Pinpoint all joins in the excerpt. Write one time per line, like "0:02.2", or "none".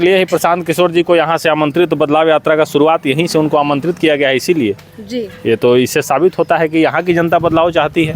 none